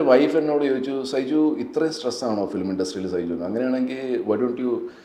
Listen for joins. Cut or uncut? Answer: uncut